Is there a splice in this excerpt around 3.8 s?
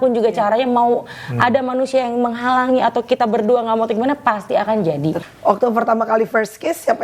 no; 1 cut; at 5.2 s

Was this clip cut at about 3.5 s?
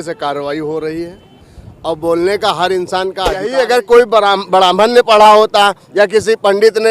yes; 1 cut; at 3.5 s

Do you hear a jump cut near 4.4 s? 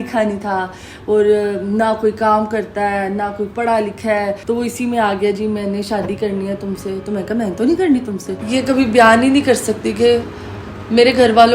yes; 2 cuts; at 4.4 s, 8.4 s

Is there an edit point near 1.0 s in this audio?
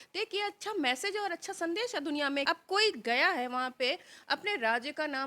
no; 1 cut; at 2.5 s

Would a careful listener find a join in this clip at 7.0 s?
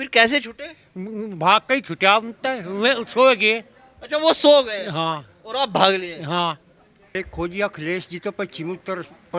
yes; 1 cut; at 7.0 s

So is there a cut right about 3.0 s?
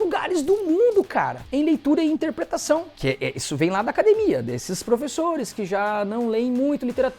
yes; 1 cut; at 3.0 s

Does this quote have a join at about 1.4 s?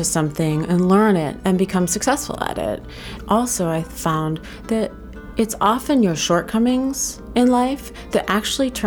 yes; 2 cuts; at 1.4 s, 3.1 s

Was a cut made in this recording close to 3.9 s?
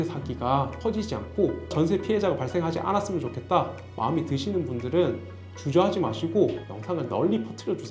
no; 1 cut; at 6.7 s

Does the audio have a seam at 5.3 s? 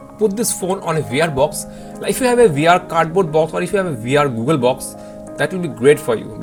no; 0 cuts

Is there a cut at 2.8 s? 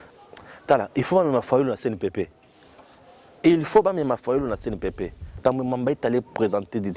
no; 1 cut; at 5.3 s

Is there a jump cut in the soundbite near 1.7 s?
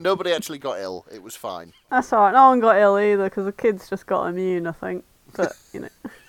yes; 1 cut; at 1.7 s

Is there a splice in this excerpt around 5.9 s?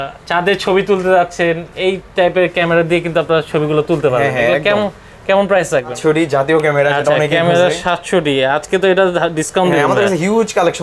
yes; 1 cut; at 5.9 s

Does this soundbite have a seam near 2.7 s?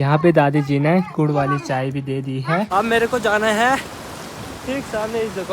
yes; 1 cut; at 2.7 s

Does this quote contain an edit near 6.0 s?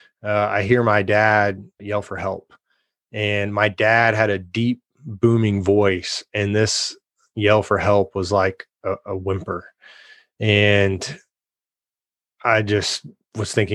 no; 1 cut; at 1.8 s

